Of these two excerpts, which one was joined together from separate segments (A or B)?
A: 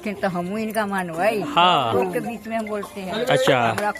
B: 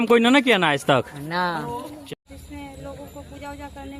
B